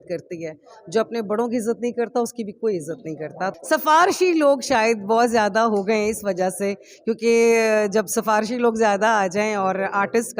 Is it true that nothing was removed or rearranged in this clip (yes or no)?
no